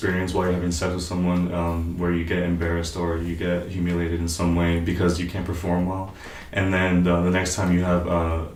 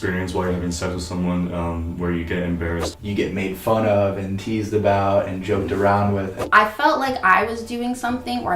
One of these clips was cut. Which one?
second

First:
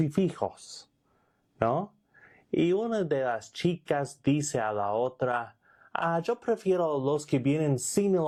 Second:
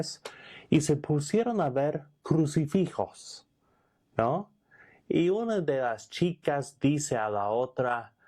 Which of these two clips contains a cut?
second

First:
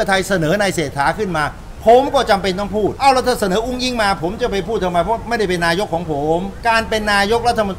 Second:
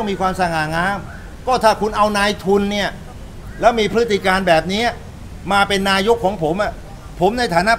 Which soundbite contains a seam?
first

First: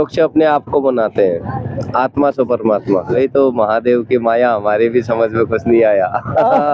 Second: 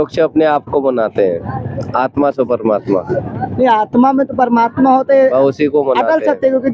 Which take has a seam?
first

